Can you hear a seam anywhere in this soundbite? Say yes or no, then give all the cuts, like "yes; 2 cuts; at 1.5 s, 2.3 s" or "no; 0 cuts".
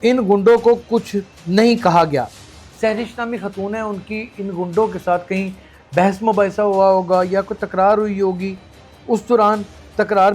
yes; 1 cut; at 2.5 s